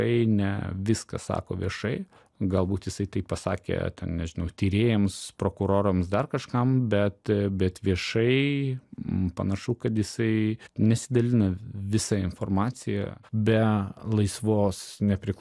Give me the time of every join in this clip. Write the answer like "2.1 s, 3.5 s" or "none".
2.2 s, 10.6 s, 13.2 s